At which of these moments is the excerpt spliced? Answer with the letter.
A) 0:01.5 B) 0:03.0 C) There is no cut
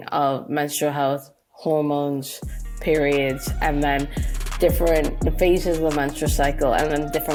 C